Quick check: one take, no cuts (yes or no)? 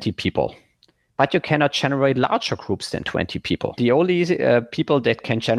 no